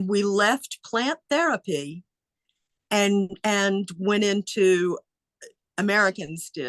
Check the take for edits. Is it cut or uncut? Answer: uncut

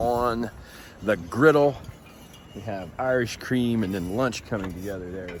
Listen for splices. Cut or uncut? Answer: uncut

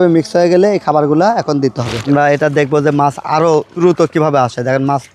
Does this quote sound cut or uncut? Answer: cut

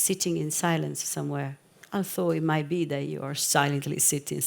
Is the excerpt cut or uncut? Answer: cut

